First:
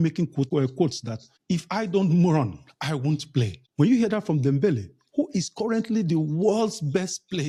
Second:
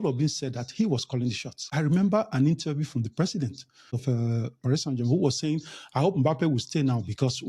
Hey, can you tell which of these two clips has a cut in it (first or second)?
second